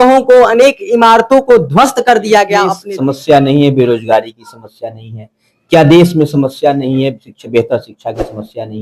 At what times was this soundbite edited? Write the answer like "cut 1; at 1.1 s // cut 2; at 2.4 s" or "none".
cut 1; at 2.8 s